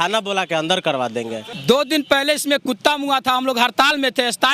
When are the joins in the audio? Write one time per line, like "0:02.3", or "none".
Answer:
0:01.4

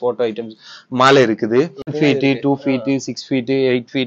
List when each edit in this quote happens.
0:01.9

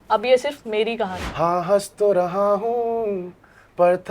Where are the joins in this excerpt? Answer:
0:01.2

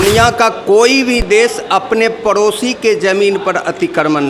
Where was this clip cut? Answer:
none

